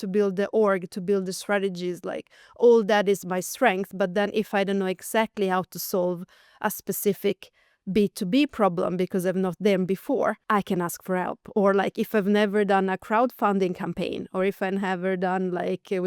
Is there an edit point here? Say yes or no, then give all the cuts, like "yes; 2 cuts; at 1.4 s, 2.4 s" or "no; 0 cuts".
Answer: yes; 1 cut; at 10.4 s